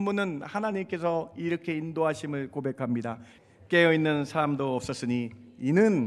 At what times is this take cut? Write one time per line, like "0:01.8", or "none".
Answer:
0:03.3